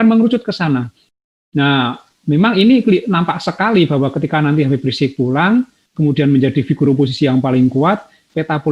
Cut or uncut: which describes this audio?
uncut